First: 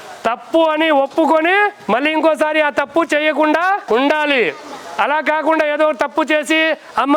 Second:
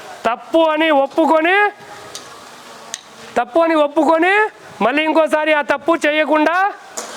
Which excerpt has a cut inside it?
first; 2 cuts; at 1.8 s, 3.8 s

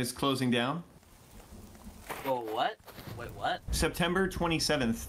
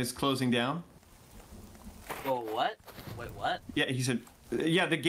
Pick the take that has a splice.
first; 1 cut; at 3.6 s

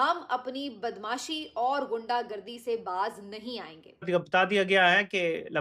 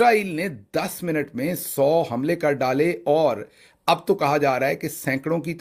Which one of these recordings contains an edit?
first; 1 cut; at 4.0 s

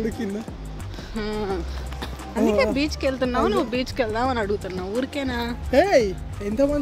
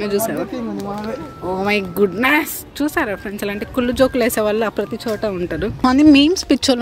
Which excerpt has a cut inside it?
second; 1 cut; at 5.8 s

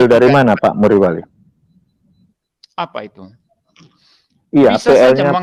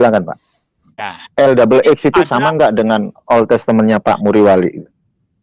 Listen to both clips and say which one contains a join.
second; 1 cut; at 1.2 s

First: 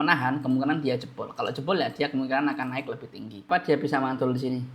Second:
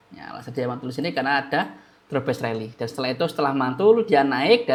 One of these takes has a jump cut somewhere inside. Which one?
first; 1 cut; at 3.5 s

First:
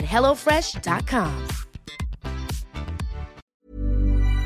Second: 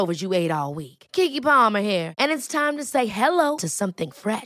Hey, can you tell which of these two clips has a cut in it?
first; 1 cut; at 3.5 s

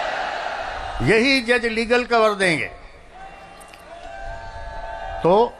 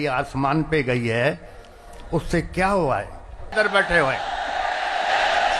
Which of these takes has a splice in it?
second; 1 cut; at 3.5 s

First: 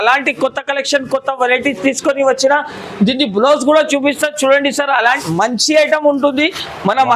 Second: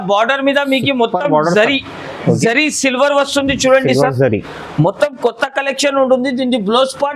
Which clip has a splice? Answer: first; 1 cut; at 5.2 s

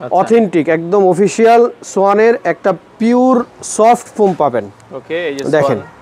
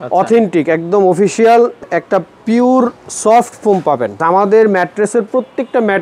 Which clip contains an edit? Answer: second; 2 cuts; at 1.9 s, 4.2 s

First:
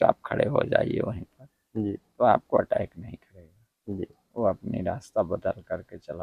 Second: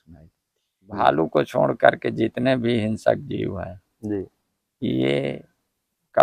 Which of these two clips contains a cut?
second; 1 cut; at 1.0 s

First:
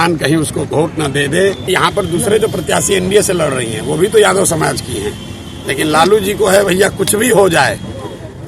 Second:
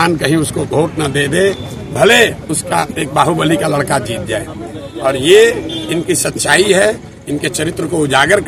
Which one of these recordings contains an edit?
first; 1 cut; at 1.7 s

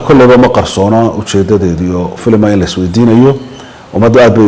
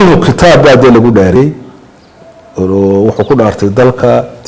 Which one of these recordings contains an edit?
second; 1 cut; at 1.4 s

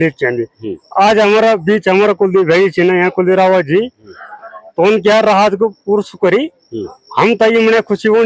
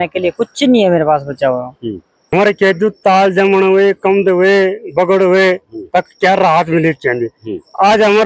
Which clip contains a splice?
second; 1 cut; at 2.1 s

